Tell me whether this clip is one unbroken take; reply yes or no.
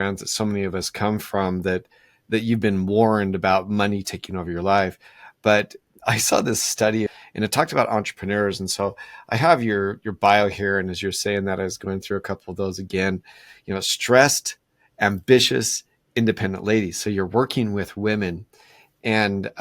no